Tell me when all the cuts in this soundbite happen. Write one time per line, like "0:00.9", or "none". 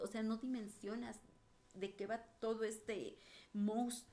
none